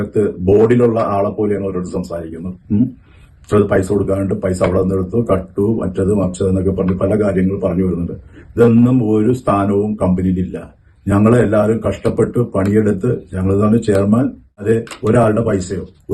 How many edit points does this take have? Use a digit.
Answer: 1